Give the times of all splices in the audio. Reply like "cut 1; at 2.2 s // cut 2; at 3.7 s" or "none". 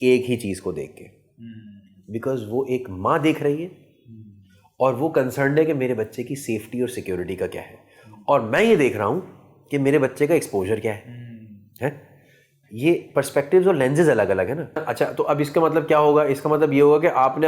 cut 1; at 14.9 s